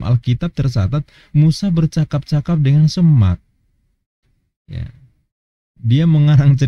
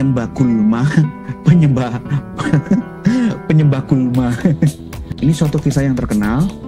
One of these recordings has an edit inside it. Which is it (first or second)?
second